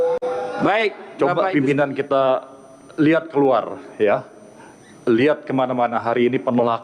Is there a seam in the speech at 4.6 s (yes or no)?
no